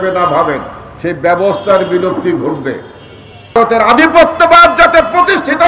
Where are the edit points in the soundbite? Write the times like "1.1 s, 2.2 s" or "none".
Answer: 3.6 s